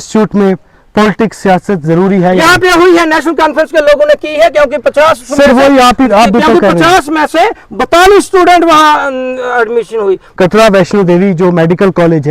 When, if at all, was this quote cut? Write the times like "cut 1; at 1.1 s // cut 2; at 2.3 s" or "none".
cut 1; at 10.3 s